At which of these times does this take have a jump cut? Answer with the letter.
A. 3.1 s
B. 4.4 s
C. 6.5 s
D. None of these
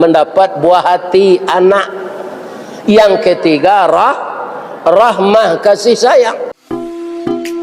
C